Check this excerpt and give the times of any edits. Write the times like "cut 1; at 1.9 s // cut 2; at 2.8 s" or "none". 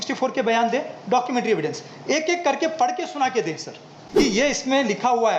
cut 1; at 4.2 s

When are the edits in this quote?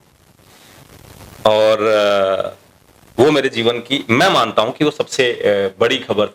none

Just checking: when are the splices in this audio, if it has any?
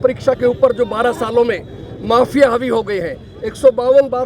none

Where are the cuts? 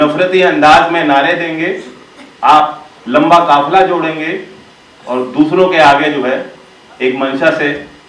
none

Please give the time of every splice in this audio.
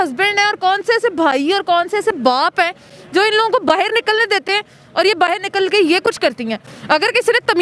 cut 1; at 6.7 s

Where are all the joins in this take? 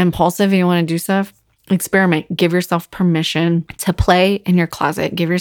cut 1; at 3.7 s

